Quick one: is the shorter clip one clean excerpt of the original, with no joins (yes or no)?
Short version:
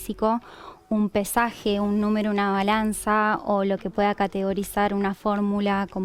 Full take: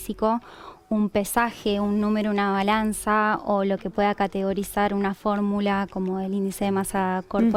yes